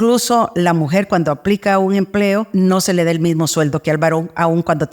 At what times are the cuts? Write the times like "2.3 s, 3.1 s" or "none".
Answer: 2.5 s